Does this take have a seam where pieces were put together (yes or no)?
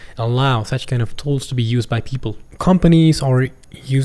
yes